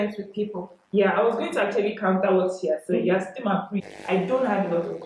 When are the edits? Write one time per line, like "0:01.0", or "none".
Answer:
0:03.7